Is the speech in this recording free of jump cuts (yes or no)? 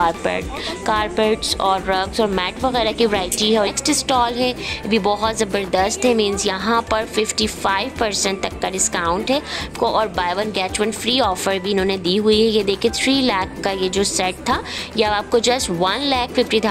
no